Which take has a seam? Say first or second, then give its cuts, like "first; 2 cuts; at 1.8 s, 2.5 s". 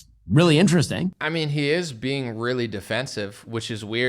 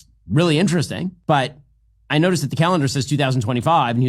second; 1 cut; at 1.2 s